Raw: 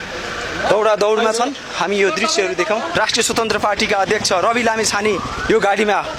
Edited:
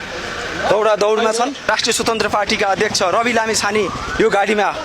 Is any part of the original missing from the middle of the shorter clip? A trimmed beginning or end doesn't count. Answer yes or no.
yes